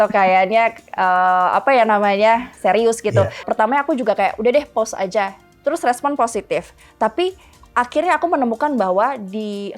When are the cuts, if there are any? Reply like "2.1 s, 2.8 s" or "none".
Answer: 3.4 s